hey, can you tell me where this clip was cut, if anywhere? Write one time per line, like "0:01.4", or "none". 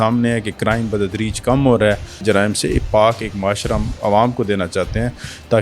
0:02.2